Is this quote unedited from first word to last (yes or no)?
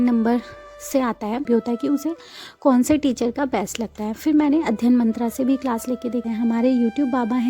no